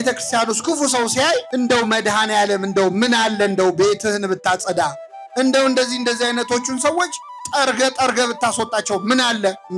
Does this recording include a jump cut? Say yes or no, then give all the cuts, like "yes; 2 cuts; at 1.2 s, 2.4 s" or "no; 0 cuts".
yes; 1 cut; at 1.5 s